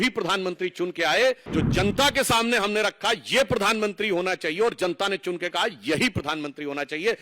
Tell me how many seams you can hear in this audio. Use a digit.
1